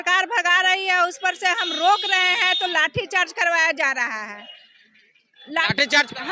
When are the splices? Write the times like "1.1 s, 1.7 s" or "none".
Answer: none